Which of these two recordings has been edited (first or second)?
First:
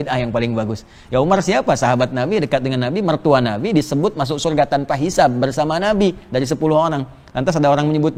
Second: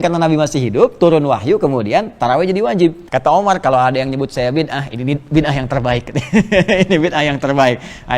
second